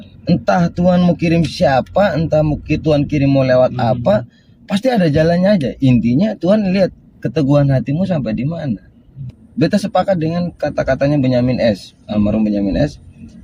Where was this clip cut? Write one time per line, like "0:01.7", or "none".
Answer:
0:09.4